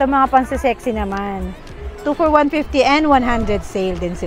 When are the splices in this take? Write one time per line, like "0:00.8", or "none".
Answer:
none